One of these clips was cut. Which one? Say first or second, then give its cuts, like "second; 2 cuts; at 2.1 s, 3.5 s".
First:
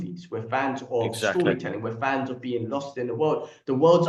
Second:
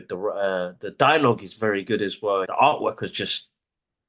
second; 1 cut; at 2.5 s